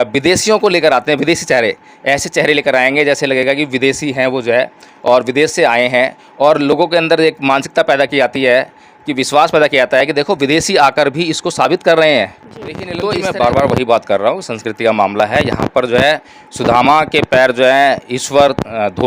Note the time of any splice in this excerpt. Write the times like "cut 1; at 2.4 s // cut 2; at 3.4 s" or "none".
cut 1; at 12.9 s